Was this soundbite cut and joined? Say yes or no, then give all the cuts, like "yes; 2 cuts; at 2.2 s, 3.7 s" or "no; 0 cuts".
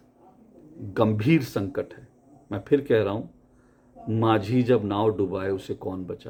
no; 0 cuts